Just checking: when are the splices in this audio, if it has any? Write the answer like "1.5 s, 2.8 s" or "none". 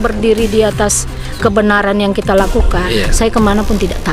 2.9 s